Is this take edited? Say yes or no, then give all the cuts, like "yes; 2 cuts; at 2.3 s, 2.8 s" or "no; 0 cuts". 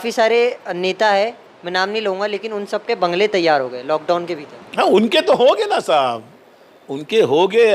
no; 0 cuts